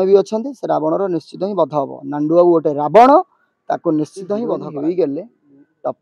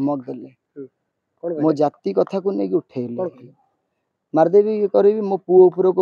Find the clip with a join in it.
first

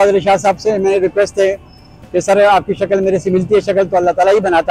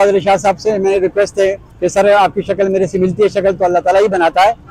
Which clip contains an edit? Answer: second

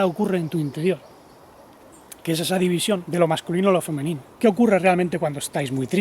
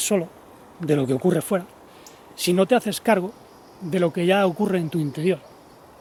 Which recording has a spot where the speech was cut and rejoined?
first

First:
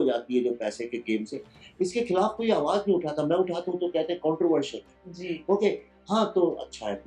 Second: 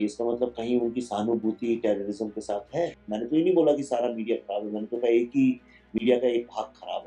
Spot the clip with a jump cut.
second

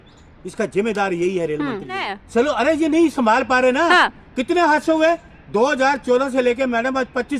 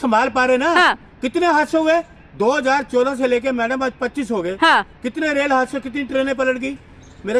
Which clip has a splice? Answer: first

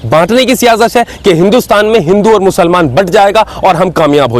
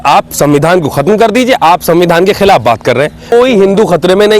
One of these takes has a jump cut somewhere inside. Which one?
second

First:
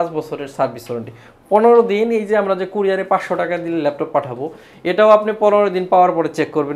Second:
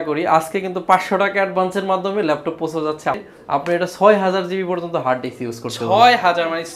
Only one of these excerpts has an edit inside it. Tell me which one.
second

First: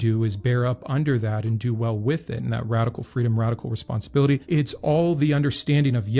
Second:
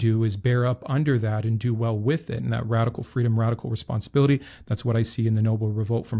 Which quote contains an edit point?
first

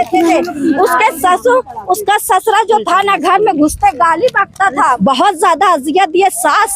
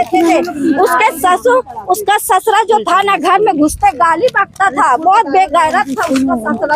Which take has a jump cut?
first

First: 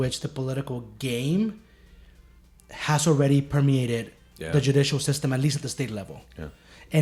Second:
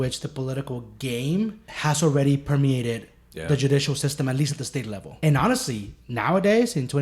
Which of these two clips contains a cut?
second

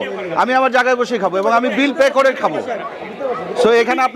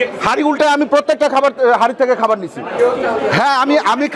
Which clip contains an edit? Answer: second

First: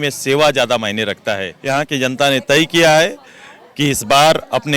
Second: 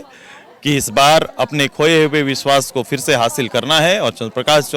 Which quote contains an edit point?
first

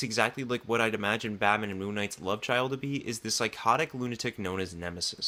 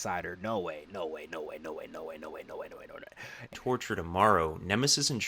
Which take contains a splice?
second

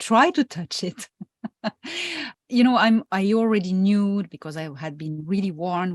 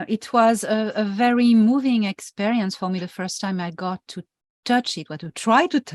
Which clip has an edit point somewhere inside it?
first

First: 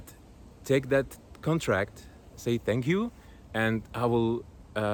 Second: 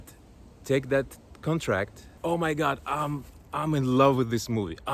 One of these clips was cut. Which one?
second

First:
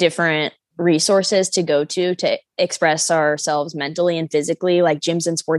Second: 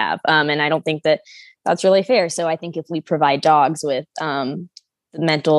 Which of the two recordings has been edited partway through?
first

